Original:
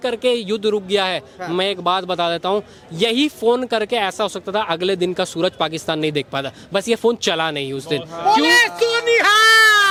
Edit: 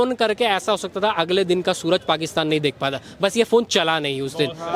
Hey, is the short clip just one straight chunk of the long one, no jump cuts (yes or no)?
yes